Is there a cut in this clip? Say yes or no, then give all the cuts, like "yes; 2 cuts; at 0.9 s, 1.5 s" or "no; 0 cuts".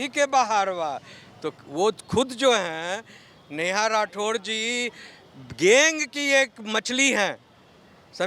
no; 0 cuts